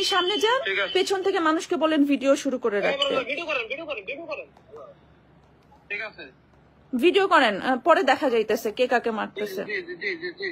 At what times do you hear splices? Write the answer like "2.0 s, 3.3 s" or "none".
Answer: none